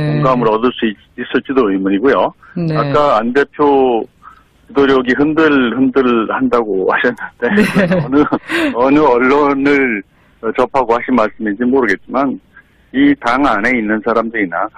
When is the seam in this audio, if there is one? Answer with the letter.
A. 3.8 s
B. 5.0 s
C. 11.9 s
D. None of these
A